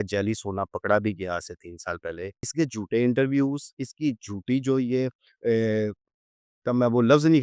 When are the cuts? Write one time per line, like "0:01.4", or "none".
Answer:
0:02.5